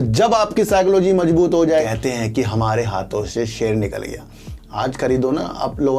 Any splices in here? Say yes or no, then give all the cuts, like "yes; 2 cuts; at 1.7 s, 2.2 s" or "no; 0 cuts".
yes; 1 cut; at 1.9 s